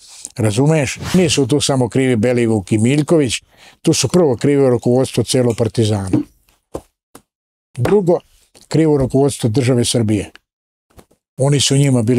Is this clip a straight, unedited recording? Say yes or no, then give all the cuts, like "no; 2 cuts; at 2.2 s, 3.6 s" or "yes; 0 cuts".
no; 1 cut; at 1.1 s